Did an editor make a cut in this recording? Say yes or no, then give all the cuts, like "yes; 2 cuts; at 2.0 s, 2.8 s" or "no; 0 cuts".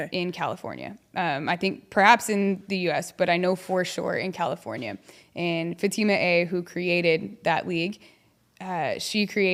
no; 0 cuts